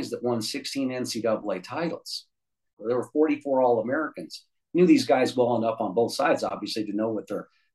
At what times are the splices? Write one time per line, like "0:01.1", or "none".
0:02.8